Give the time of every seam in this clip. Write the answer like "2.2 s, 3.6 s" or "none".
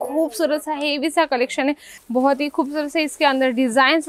1.9 s